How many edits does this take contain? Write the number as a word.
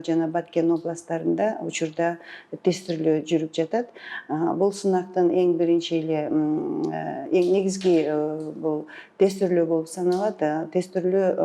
zero